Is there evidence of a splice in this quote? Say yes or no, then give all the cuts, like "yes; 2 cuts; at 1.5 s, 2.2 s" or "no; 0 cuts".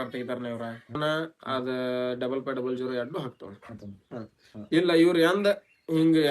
yes; 1 cut; at 1.0 s